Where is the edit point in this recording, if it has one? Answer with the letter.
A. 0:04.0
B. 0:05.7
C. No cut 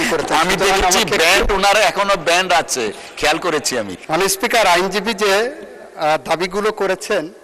A